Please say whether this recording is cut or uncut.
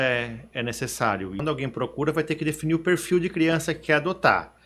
cut